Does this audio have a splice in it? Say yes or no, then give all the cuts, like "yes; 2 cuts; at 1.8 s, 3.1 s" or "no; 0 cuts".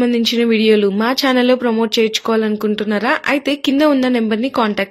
no; 0 cuts